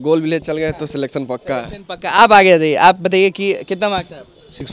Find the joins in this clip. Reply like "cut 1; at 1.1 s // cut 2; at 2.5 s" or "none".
none